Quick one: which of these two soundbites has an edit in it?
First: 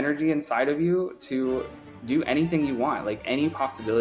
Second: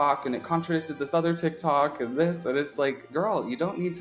second; 1 cut; at 3.0 s

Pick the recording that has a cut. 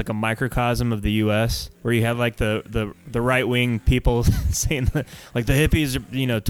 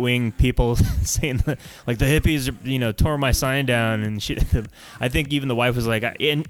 first; 1 cut; at 1.7 s

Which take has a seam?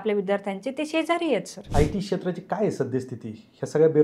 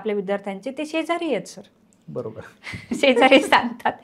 first; 1 cut; at 1.6 s

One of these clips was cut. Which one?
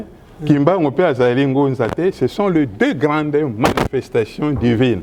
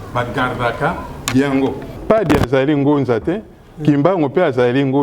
second; 1 cut; at 1.9 s

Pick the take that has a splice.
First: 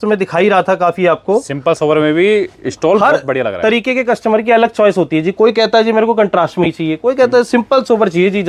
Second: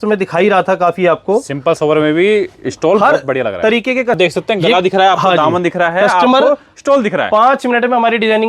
second; 1 cut; at 4.2 s

